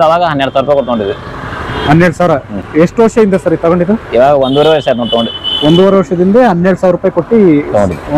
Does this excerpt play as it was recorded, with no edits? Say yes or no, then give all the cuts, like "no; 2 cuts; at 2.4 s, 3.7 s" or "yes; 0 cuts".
yes; 0 cuts